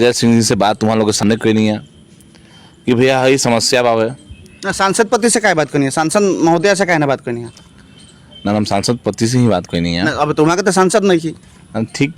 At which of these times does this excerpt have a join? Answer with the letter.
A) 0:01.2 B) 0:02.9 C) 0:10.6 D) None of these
A